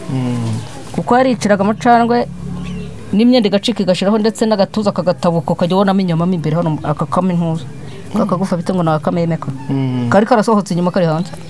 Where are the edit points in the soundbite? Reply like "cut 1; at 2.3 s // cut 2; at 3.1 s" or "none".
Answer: none

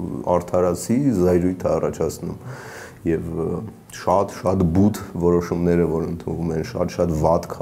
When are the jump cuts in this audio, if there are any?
none

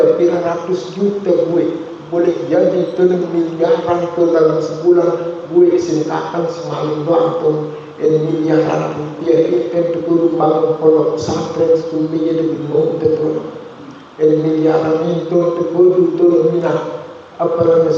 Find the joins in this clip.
none

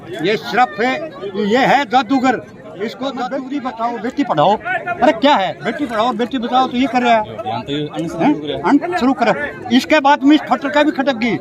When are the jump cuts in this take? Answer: cut 1; at 3.0 s

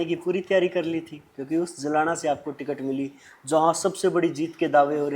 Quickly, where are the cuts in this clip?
none

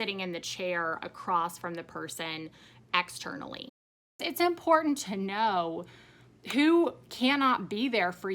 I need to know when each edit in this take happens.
cut 1; at 4.3 s

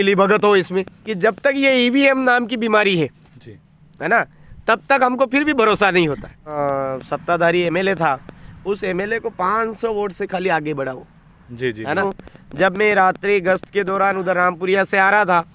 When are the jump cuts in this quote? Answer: cut 1; at 1.0 s // cut 2; at 6.5 s // cut 3; at 12.0 s

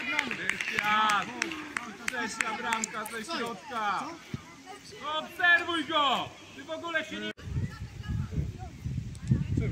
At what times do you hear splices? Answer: cut 1; at 7.3 s

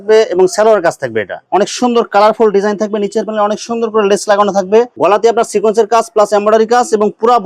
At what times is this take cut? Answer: cut 1; at 1.4 s

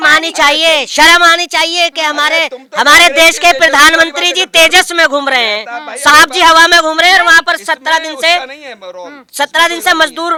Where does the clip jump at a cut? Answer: none

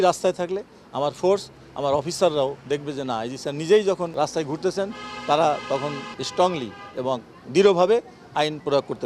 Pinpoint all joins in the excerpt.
cut 1; at 4.1 s // cut 2; at 6.2 s

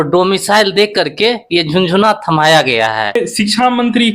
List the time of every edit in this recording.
cut 1; at 3.2 s

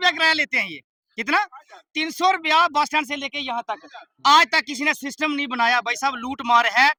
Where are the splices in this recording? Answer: none

